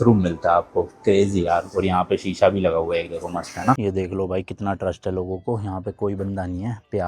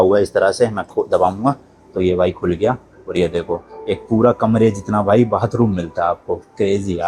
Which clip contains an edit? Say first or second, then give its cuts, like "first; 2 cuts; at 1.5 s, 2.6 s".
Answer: first; 1 cut; at 3.7 s